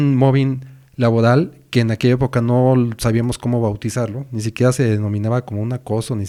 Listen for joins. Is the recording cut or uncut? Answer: uncut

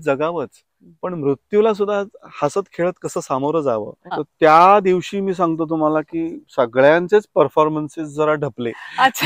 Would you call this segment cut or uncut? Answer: cut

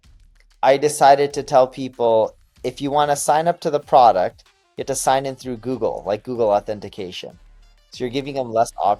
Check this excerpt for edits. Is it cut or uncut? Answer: uncut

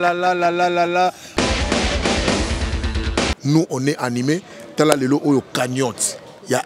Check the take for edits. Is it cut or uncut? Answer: cut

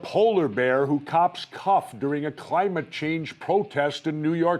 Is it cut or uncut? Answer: cut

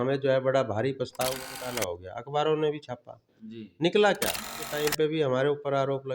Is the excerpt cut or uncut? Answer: cut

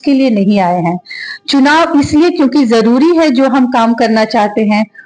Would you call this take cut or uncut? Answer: uncut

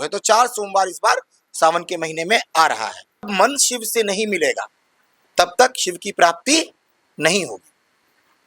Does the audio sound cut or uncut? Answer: cut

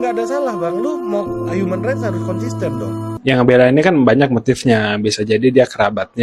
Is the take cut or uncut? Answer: cut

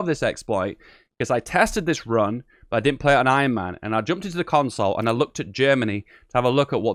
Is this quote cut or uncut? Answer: uncut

